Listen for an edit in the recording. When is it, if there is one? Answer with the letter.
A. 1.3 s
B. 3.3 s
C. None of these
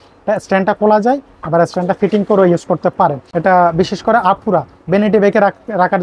B